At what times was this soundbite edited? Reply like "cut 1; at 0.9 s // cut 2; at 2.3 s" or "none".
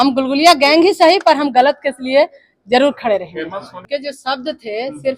none